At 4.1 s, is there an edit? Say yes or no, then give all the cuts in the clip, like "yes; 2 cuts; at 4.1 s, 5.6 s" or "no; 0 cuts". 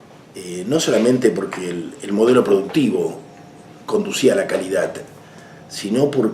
yes; 1 cut; at 4.1 s